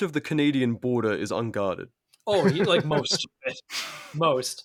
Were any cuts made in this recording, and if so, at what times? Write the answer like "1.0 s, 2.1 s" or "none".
none

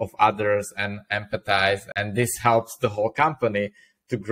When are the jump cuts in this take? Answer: 1.9 s

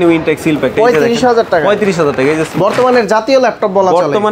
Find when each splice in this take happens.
2.5 s

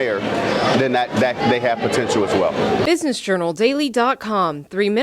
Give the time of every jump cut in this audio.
2.8 s

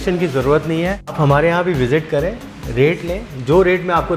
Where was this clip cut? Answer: 1.2 s

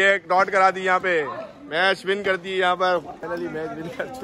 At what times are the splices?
3.2 s

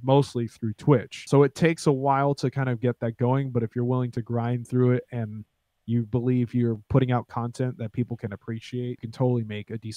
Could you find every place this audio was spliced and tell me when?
1.2 s, 9.1 s

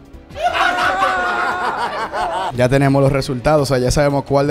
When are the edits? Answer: 2.5 s

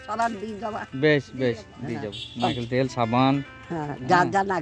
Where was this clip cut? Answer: none

